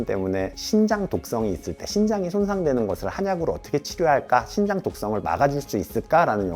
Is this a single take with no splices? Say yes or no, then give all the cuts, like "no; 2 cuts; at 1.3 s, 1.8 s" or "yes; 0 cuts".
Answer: yes; 0 cuts